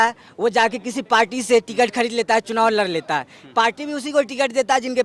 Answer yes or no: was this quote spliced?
no